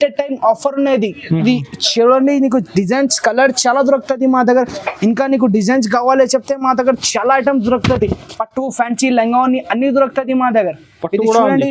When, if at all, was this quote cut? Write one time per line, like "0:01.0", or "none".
none